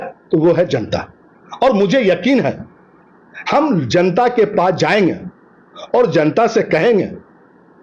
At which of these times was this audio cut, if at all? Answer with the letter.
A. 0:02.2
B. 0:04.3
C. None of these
C